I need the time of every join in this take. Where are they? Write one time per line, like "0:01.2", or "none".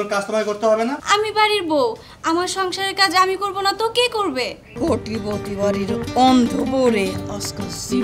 0:01.0
0:04.7

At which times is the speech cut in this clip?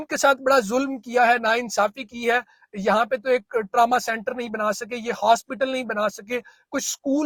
none

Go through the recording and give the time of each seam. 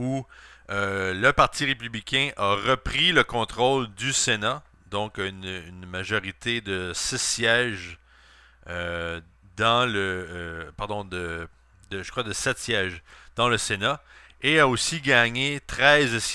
none

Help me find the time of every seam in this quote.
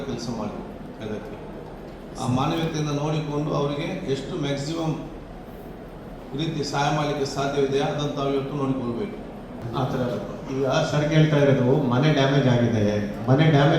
0:09.6

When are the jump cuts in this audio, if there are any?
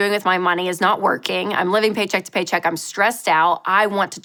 none

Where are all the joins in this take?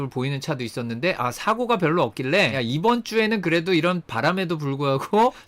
none

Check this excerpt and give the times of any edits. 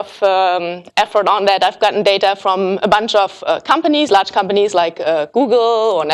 none

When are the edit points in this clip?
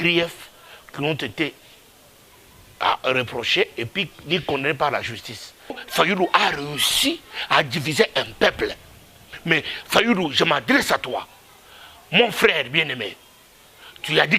0:05.8

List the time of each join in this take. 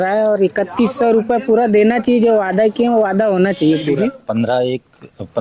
0:04.1

